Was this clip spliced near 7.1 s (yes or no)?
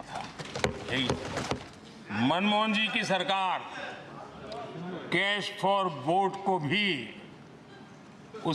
no